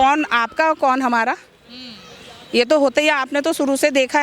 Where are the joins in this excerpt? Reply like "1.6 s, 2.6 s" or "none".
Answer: none